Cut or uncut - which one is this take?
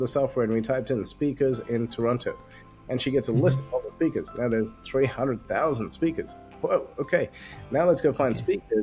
uncut